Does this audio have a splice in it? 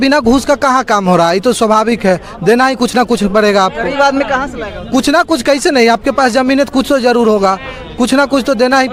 no; 0 cuts

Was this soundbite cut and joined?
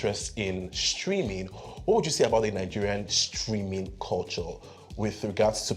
no; 0 cuts

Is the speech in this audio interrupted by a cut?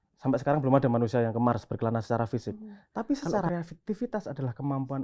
yes; 1 cut; at 3.5 s

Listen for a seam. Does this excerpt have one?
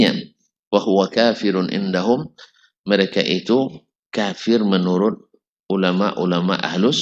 no; 0 cuts

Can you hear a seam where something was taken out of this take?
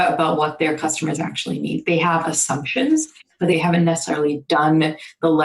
yes; 1 cut; at 3.5 s

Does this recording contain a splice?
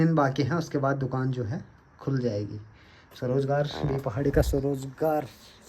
no; 0 cuts

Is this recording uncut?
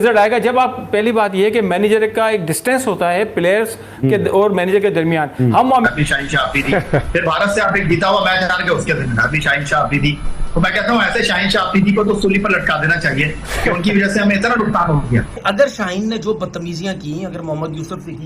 no; 2 cuts; at 5.9 s, 15.3 s

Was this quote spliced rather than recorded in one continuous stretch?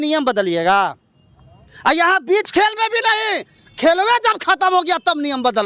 no; 0 cuts

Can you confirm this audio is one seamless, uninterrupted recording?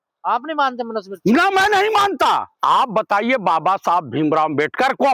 no; 1 cut; at 2.5 s

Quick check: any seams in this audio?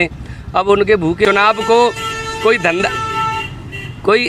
yes; 1 cut; at 1.3 s

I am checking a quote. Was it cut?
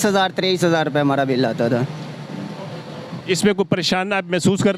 no; 0 cuts

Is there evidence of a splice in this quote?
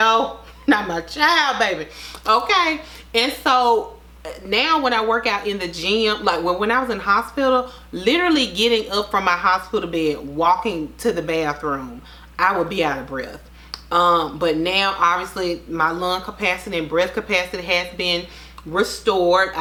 no; 0 cuts

